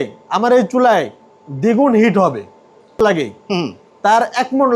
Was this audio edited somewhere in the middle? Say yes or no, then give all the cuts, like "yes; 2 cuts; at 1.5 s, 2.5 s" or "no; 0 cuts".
yes; 1 cut; at 3.0 s